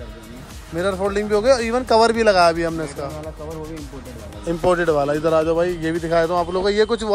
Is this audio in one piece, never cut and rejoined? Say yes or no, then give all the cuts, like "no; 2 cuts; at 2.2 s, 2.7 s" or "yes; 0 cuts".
yes; 0 cuts